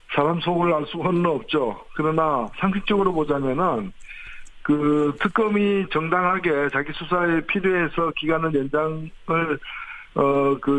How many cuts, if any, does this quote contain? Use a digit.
1